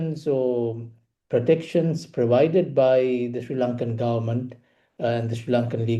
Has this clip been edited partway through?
no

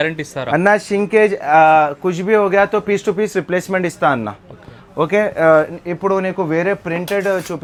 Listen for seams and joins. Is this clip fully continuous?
yes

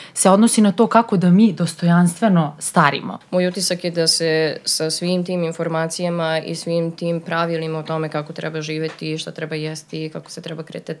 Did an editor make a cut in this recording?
yes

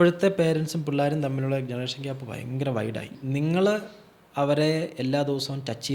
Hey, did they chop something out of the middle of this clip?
yes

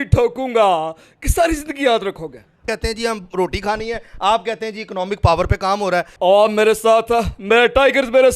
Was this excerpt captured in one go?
no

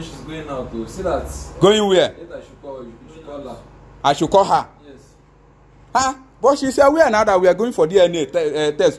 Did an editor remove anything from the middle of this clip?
no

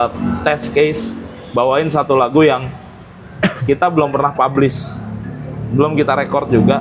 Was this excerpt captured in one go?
yes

